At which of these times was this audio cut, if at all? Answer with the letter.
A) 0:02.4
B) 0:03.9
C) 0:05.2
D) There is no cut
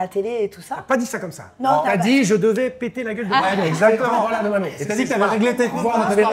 D